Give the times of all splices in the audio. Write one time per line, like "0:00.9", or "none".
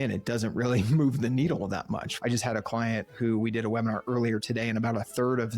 0:02.1